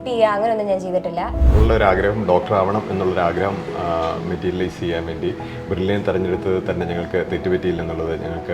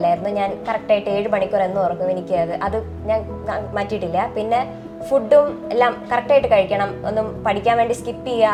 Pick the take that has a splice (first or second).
first